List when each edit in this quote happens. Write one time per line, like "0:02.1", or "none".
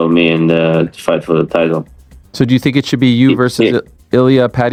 none